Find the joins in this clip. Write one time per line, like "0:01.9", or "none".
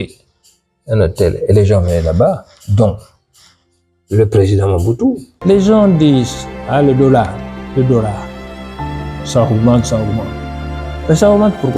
0:05.3